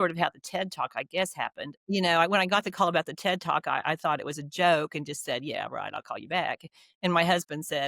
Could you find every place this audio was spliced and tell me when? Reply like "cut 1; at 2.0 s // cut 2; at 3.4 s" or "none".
cut 1; at 1.7 s